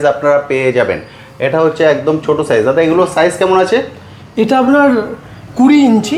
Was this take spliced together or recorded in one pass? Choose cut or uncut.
uncut